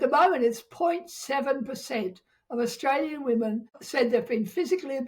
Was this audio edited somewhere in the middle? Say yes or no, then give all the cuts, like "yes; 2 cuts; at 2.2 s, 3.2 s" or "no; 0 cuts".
yes; 1 cut; at 3.8 s